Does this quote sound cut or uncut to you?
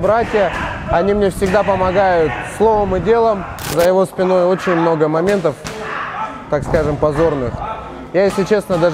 cut